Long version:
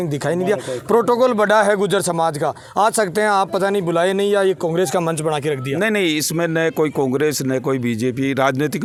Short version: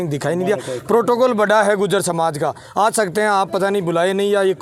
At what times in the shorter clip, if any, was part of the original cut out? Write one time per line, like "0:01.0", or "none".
none